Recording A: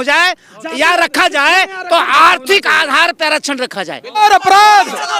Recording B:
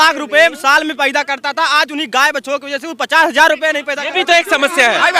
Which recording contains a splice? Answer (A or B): A